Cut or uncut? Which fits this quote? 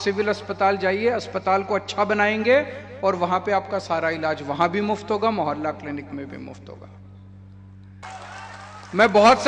cut